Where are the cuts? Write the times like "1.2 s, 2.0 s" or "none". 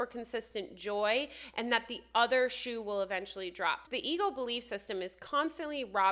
3.8 s